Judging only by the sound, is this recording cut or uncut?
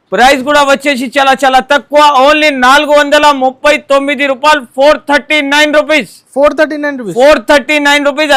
uncut